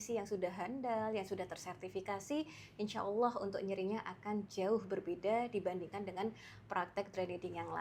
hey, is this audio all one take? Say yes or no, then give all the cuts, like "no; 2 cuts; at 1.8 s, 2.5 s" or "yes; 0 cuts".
yes; 0 cuts